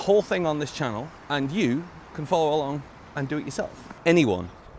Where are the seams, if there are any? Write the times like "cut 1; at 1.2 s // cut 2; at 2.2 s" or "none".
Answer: cut 1; at 1.2 s // cut 2; at 3.8 s